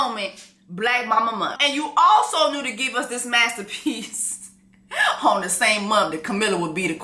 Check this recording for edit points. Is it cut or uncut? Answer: cut